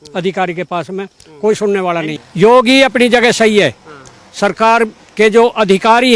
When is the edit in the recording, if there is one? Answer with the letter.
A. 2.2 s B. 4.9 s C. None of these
A